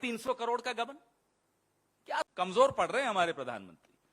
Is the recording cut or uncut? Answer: cut